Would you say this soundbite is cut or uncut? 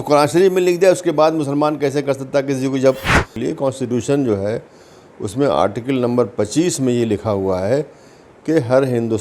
cut